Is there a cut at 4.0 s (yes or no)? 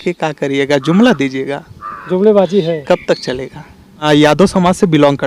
yes